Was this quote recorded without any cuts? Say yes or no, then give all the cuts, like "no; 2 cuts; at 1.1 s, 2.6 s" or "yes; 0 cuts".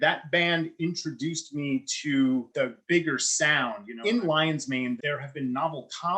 no; 3 cuts; at 2.5 s, 3.9 s, 5.0 s